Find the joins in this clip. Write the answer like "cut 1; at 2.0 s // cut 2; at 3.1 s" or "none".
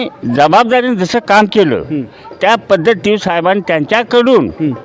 none